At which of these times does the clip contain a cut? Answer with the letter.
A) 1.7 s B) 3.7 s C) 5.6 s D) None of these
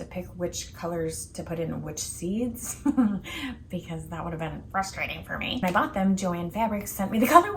C